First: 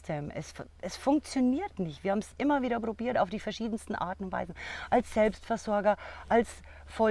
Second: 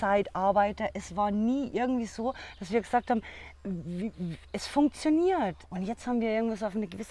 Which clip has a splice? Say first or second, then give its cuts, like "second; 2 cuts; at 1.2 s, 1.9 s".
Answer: second; 1 cut; at 5.7 s